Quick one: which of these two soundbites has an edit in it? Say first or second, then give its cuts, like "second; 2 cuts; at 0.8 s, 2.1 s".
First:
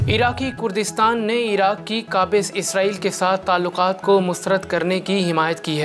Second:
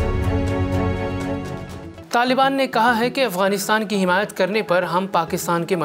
second; 1 cut; at 2.0 s